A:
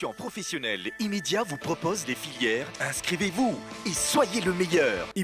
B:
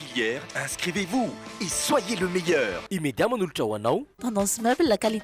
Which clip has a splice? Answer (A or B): B